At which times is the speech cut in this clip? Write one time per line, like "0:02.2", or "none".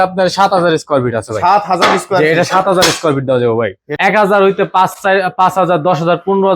0:03.8